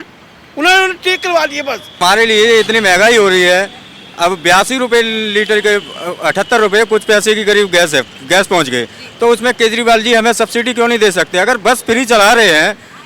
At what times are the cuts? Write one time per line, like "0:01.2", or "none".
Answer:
0:02.0